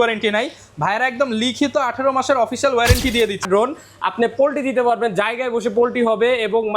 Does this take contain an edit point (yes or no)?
yes